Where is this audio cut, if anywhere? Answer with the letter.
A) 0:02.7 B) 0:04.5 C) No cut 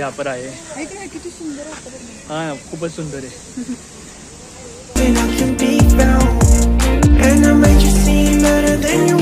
C